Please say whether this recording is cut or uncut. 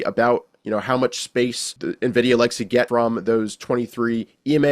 cut